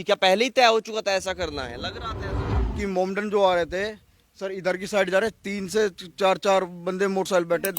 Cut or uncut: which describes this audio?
cut